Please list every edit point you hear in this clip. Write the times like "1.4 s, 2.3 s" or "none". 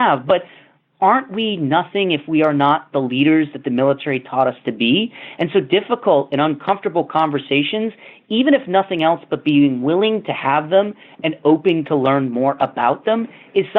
none